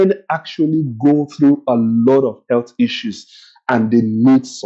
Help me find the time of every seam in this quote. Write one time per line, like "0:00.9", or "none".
none